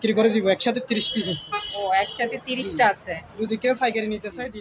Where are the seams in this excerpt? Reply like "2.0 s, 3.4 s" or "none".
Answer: none